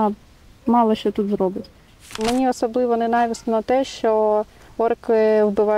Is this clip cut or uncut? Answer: cut